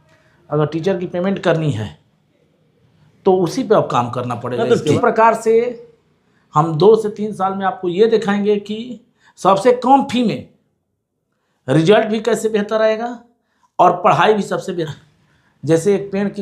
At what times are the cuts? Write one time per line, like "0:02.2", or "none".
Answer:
0:05.0
0:14.9